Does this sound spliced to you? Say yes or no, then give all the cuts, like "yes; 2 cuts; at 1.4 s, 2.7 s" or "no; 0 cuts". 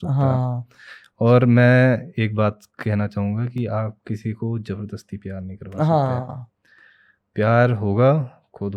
no; 0 cuts